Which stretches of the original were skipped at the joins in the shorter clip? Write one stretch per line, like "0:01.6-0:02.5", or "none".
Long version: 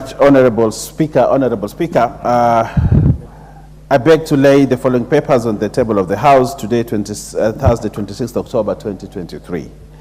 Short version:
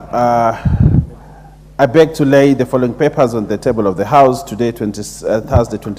none